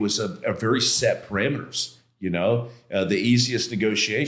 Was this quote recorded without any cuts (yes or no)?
yes